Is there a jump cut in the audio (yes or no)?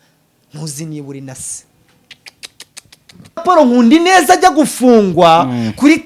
yes